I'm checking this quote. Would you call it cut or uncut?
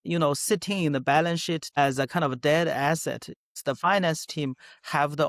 cut